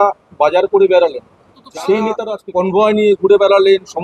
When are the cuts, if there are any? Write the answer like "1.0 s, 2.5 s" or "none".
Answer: 2.3 s